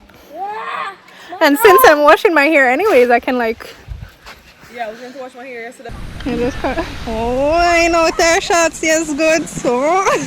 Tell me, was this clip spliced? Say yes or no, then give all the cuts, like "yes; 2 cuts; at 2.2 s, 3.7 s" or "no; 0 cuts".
yes; 1 cut; at 5.8 s